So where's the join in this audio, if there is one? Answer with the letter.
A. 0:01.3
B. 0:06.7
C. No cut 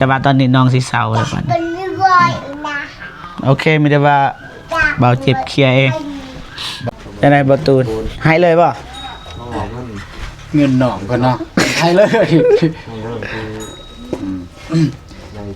B